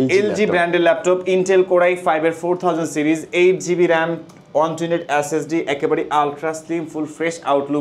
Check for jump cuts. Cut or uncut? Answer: uncut